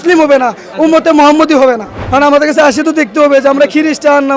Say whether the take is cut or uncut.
cut